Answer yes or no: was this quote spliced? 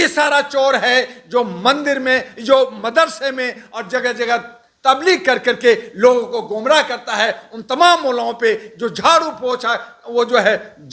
no